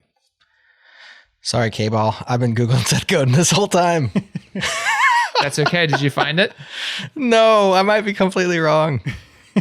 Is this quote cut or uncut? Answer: uncut